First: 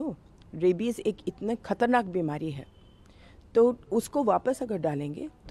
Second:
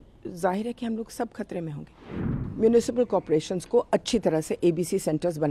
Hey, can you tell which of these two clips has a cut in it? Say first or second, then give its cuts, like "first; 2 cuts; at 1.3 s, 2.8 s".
second; 1 cut; at 2.3 s